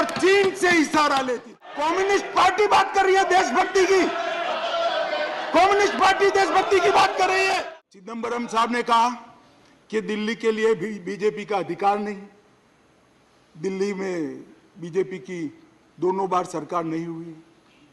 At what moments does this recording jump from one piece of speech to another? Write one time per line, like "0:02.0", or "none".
0:01.7
0:07.7